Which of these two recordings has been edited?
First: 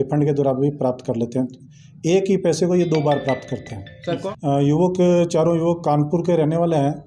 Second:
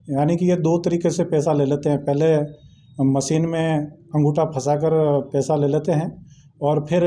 first; 1 cut; at 4.2 s

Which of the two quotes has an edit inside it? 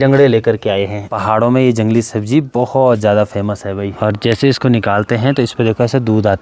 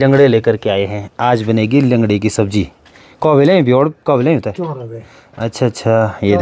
first; 2 cuts; at 1.1 s, 3.9 s

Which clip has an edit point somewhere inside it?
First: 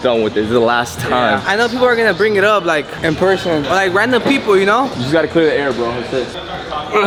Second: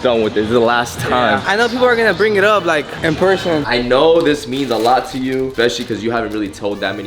second; 2 cuts; at 3.6 s, 5.5 s

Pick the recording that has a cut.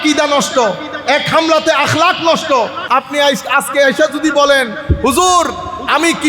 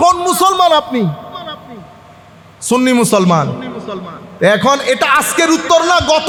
first; 1 cut; at 2.8 s

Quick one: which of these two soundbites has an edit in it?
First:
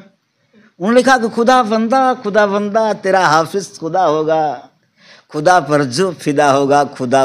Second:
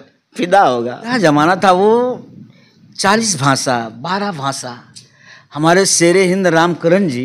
second; 1 cut; at 1.0 s

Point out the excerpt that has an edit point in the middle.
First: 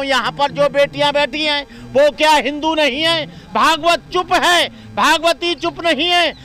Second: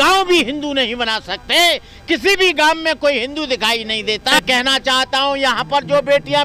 second; 1 cut; at 4.4 s

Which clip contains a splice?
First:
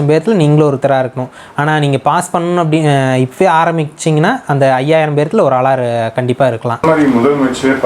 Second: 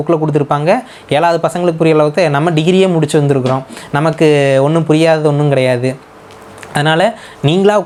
first; 1 cut; at 6.7 s

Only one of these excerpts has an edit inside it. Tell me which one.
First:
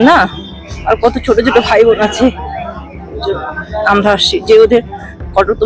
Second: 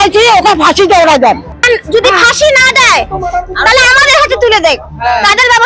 second; 1 cut; at 1.6 s

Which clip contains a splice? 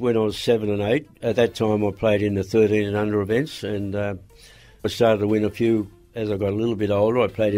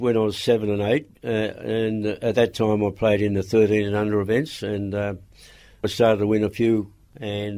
first; 2 cuts; at 1.2 s, 6.1 s

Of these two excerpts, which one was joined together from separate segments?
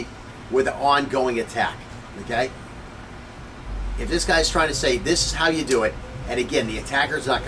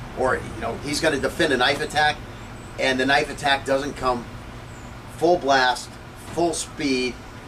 first; 1 cut; at 2.4 s

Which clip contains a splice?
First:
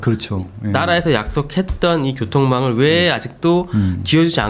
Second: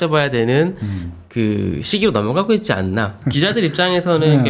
second; 1 cut; at 3.2 s

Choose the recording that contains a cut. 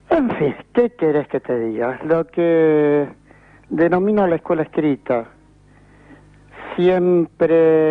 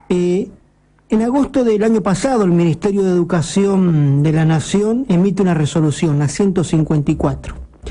second; 1 cut; at 5.0 s

